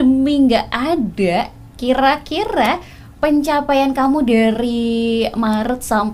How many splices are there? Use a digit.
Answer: 0